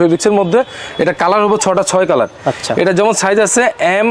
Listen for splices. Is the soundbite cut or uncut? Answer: uncut